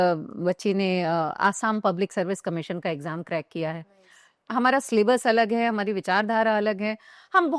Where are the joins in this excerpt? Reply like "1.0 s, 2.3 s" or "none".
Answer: 4.4 s